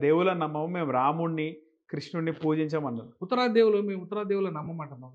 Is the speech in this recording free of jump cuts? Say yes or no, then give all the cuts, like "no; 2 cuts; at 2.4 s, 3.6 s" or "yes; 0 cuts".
yes; 0 cuts